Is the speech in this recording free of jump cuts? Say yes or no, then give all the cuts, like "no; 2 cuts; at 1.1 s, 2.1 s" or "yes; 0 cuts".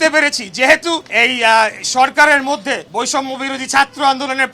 no; 2 cuts; at 1.1 s, 2.8 s